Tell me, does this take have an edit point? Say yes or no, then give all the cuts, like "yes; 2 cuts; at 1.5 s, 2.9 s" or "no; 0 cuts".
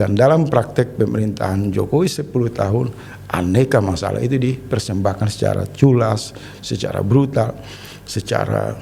no; 0 cuts